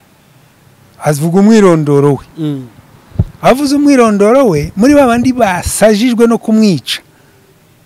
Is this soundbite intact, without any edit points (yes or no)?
yes